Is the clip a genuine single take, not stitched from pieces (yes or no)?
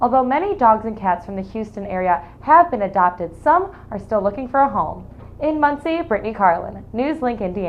yes